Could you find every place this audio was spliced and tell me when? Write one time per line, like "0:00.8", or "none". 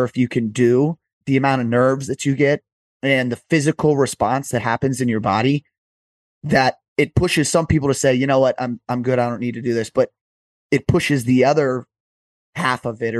0:01.1